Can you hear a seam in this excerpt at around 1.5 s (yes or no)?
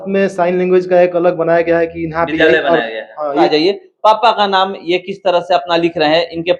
no